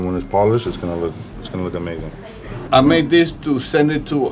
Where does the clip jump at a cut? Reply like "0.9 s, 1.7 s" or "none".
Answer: 2.6 s